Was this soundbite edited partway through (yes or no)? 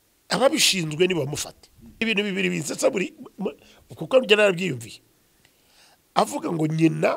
yes